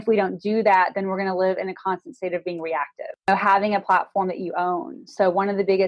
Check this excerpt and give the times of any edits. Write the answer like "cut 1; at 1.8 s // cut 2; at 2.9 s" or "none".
cut 1; at 3.3 s